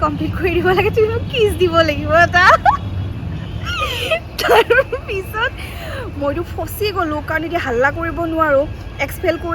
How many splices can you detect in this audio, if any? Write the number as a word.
zero